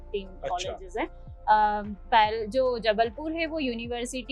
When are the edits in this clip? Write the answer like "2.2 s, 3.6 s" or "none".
none